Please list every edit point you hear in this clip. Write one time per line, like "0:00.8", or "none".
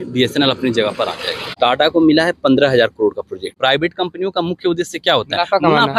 0:01.5
0:03.6